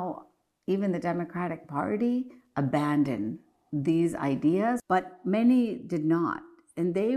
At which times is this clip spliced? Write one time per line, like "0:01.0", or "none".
0:04.8